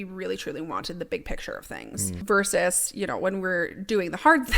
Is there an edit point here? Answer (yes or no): yes